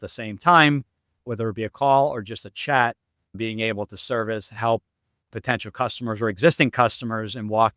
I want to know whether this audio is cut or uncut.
uncut